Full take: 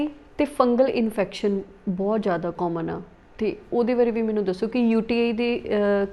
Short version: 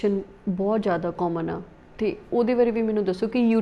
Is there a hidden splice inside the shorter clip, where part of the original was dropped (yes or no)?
no